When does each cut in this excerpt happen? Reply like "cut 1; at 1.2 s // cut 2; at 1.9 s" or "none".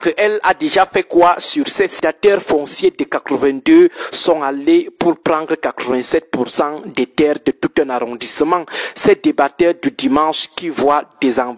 cut 1; at 2.0 s

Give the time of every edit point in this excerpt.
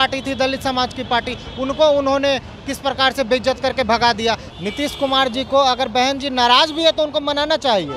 cut 1; at 4.5 s

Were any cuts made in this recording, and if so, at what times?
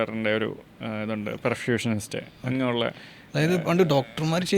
none

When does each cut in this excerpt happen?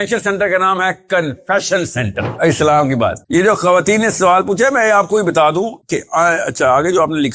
cut 1; at 2.3 s

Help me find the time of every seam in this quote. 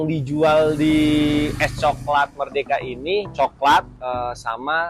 cut 1; at 3.3 s // cut 2; at 3.9 s

